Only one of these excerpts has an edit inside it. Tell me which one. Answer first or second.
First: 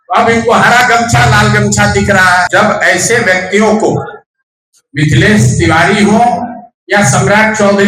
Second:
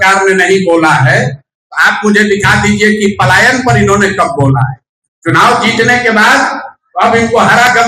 first